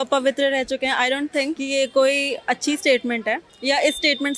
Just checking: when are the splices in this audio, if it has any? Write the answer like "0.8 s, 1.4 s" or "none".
1.6 s, 3.5 s